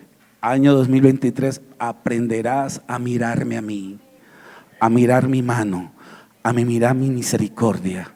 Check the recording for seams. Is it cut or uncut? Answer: uncut